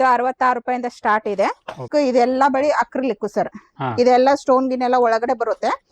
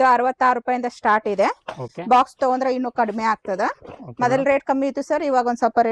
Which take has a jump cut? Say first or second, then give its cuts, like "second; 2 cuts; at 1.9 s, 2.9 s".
first; 1 cut; at 1.8 s